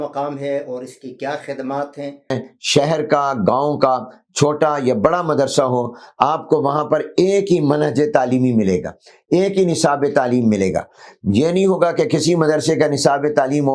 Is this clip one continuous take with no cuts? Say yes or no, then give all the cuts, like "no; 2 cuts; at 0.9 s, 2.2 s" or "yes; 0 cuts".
no; 1 cut; at 2.3 s